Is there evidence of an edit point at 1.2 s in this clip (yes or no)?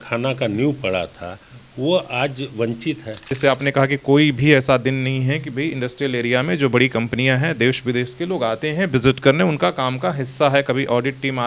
no